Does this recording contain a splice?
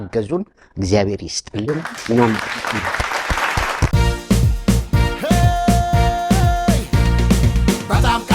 yes; 1 cut; at 3.9 s

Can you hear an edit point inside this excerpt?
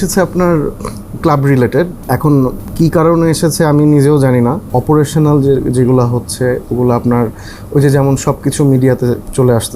yes; 1 cut; at 4.7 s

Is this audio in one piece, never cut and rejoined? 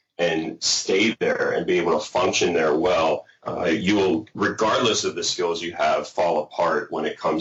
yes; 0 cuts

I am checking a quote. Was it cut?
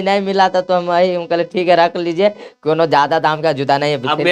no; 0 cuts

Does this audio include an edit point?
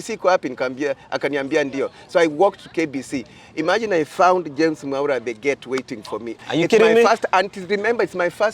yes; 1 cut; at 6.4 s

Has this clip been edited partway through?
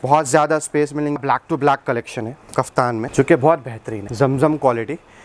yes; 3 cuts; at 1.2 s, 3.1 s, 4.0 s

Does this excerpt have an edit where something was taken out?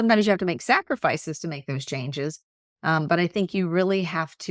no; 0 cuts

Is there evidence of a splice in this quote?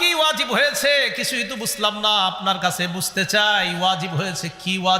no; 0 cuts

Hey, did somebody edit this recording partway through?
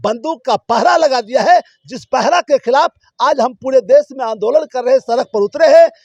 no; 0 cuts

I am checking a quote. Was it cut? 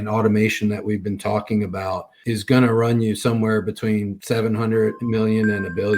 yes; 3 cuts; at 2.1 s, 4.2 s, 5.0 s

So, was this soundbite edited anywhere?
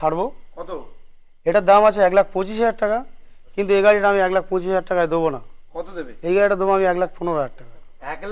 no; 0 cuts

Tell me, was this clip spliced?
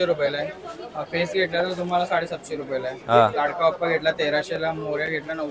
no; 0 cuts

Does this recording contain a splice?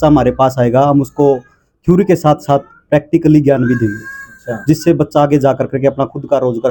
no; 0 cuts

